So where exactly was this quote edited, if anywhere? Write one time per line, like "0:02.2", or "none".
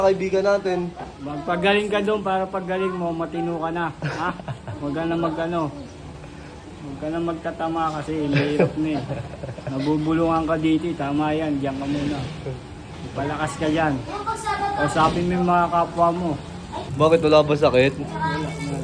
none